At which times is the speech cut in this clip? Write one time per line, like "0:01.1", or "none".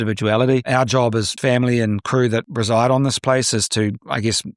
0:01.3
0:02.5